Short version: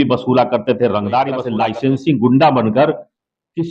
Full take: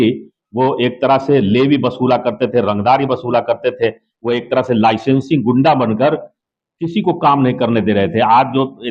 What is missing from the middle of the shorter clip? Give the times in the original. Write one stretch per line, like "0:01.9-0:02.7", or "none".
0:03.2-0:04.7